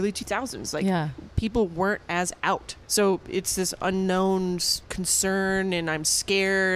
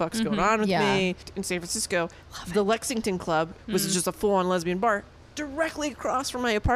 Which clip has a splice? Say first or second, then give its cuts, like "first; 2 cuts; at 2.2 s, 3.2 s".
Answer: second; 2 cuts; at 1.3 s, 3.6 s